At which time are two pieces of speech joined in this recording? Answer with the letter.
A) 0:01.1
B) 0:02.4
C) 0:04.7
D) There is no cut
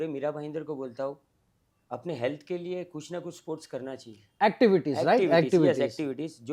D